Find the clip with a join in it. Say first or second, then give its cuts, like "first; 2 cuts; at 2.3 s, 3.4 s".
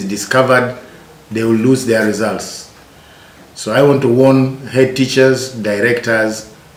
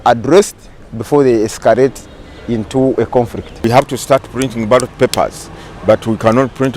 second; 1 cut; at 3.5 s